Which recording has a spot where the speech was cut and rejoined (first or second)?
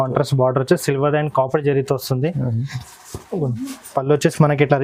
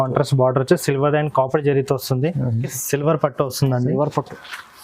second